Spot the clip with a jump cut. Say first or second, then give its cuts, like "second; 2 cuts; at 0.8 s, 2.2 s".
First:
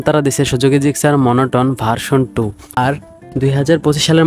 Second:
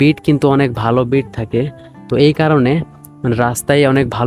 first; 1 cut; at 2.6 s